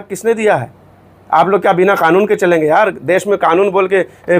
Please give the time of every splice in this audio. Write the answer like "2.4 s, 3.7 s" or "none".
none